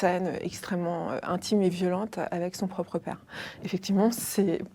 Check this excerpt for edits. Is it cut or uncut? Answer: uncut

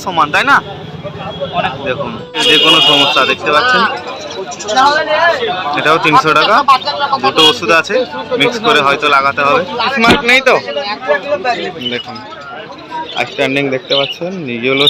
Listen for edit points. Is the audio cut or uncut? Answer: cut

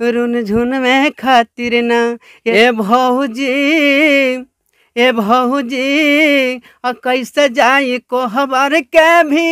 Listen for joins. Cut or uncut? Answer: cut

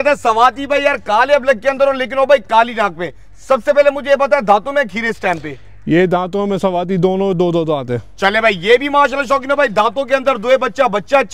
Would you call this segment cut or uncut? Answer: uncut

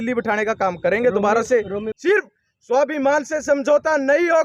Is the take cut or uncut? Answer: cut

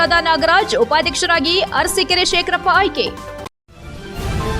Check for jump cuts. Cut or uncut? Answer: cut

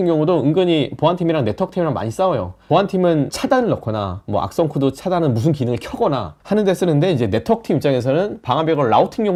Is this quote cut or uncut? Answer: uncut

